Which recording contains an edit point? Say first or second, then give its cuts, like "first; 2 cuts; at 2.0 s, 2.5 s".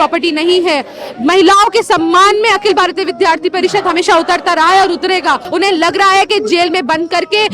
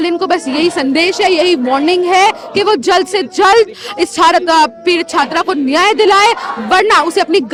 first; 1 cut; at 5.4 s